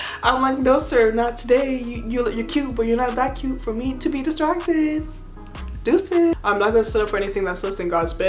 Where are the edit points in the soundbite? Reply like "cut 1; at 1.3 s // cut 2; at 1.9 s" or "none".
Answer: cut 1; at 6.3 s